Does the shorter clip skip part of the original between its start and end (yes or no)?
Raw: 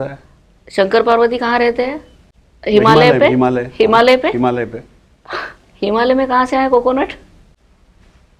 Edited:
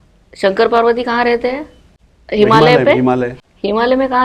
yes